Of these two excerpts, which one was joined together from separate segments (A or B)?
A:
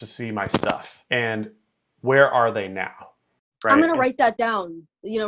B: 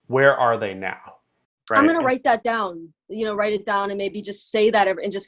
A